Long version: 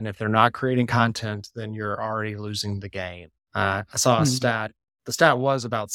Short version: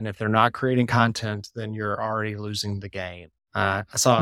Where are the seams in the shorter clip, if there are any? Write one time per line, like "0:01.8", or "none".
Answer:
none